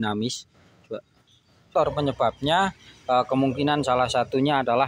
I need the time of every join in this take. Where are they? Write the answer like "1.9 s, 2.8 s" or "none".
1.7 s

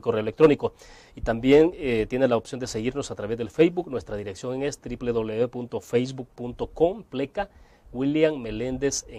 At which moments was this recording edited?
none

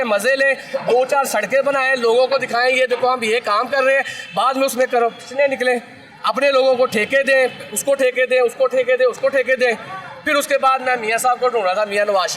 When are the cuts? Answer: none

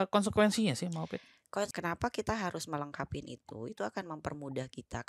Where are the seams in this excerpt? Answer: 1.7 s

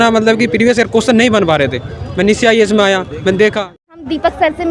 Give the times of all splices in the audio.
3.7 s

